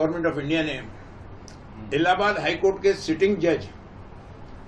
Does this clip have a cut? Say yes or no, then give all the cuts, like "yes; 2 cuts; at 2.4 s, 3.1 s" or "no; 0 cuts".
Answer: no; 0 cuts